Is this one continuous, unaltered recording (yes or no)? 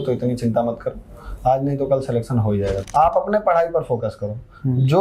no